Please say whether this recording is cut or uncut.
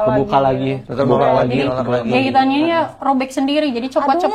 uncut